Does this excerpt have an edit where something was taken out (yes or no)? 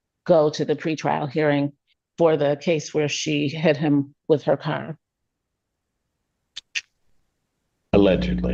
no